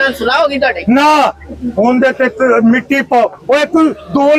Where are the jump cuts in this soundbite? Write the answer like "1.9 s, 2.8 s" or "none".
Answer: none